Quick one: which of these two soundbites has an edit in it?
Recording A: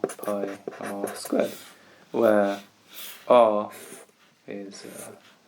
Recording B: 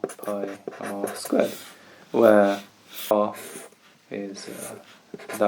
B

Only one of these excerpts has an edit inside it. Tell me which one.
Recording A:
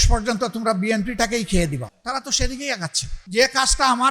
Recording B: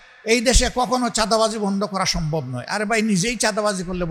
A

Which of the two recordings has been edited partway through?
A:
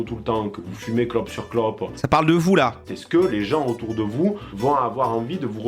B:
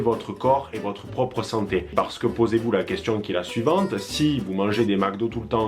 A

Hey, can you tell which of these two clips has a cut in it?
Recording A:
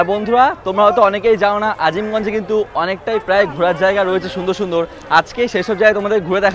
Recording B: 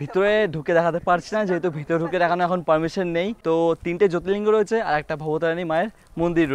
B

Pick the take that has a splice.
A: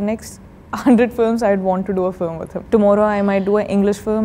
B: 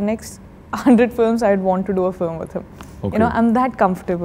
A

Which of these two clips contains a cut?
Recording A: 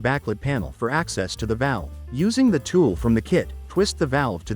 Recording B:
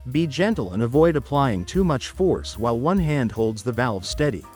A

